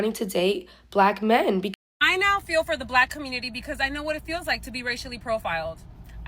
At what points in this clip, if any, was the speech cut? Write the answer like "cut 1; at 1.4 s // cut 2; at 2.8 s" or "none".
cut 1; at 1.7 s